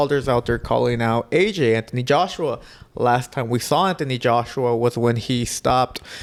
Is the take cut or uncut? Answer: uncut